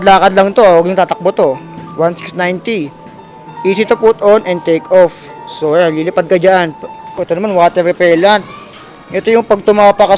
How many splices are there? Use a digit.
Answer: 1